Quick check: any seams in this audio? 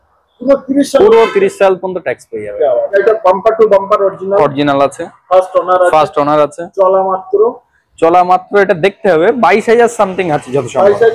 yes; 1 cut; at 3.0 s

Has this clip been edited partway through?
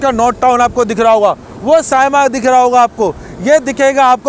no; 0 cuts

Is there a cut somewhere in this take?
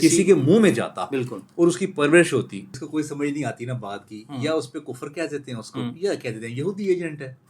yes; 1 cut; at 2.7 s

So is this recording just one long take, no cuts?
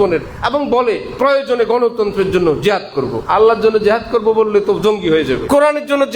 no; 2 cuts; at 3.2 s, 5.4 s

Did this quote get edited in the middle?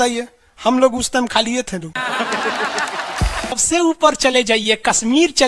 yes; 1 cut; at 3.6 s

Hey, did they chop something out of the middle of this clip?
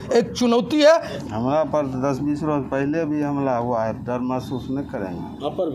yes; 1 cut; at 1.1 s

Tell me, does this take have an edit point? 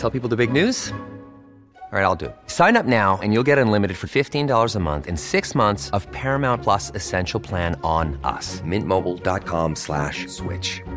no; 0 cuts

